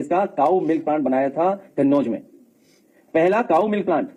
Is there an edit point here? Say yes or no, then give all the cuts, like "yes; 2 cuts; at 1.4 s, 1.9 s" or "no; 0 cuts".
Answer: no; 0 cuts